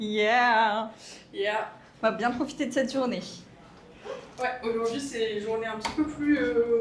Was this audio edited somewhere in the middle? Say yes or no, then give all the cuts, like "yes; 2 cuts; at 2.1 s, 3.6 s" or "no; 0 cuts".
no; 0 cuts